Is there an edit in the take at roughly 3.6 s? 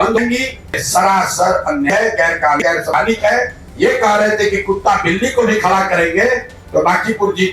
yes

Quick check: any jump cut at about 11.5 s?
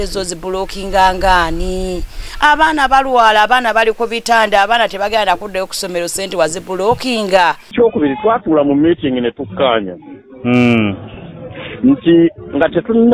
no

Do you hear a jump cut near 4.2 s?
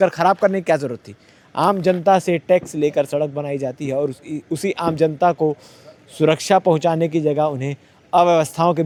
no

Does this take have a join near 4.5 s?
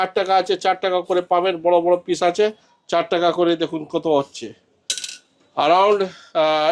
no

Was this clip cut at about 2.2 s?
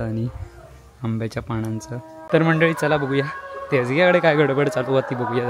yes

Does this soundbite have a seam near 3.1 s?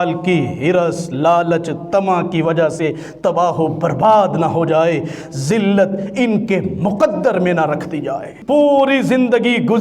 no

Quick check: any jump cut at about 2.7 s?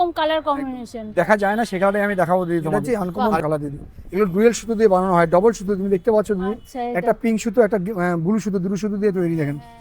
yes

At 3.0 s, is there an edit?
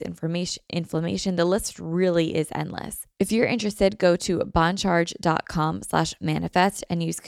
yes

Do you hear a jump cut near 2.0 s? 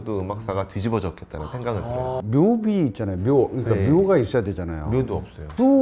yes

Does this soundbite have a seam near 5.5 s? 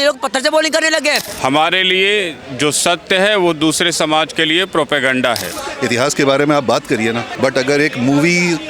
yes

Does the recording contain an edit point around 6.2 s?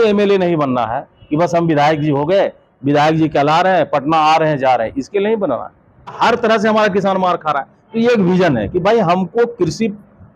yes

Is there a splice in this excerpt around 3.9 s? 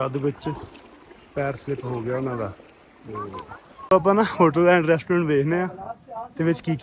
yes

